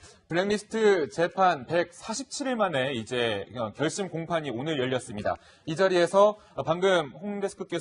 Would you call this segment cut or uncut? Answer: uncut